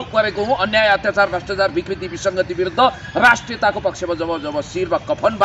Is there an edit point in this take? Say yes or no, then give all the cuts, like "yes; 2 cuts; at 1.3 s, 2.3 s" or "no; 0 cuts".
no; 0 cuts